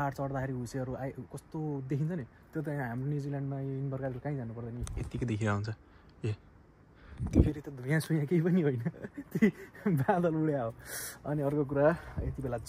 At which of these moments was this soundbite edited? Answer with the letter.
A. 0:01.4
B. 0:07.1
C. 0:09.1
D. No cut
D